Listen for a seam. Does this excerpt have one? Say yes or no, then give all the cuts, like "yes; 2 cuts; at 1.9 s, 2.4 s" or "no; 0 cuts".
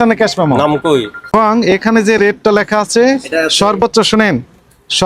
yes; 1 cut; at 1.3 s